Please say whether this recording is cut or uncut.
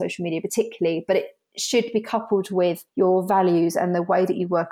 cut